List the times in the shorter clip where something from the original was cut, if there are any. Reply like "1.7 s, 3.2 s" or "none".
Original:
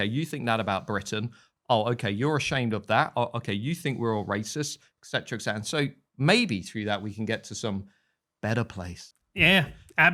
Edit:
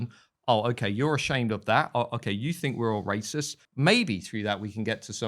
3.6 s